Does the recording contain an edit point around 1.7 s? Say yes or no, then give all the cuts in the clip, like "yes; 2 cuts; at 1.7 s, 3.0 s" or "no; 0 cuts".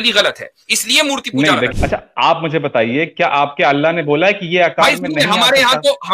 yes; 1 cut; at 1.7 s